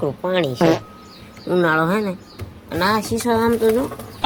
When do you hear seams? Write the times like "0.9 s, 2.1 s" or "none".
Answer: none